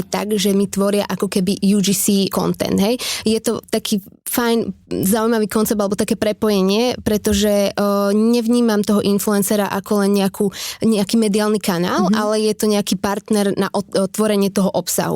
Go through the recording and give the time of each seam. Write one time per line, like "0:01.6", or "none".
0:02.3
0:03.6